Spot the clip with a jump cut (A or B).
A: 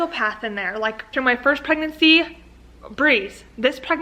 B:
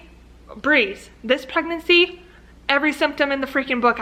A